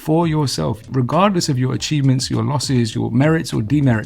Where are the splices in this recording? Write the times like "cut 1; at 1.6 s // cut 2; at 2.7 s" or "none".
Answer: cut 1; at 0.8 s // cut 2; at 2.9 s

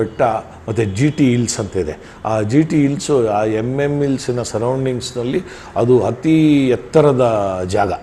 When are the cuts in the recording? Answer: none

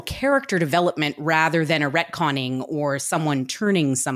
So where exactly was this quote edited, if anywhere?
none

